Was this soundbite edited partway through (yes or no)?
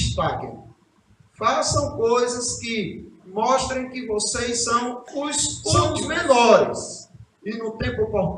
yes